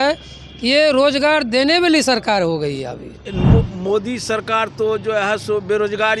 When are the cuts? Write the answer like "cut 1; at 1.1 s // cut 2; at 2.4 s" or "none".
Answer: cut 1; at 3.3 s